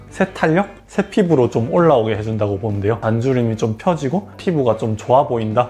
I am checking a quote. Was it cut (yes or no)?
yes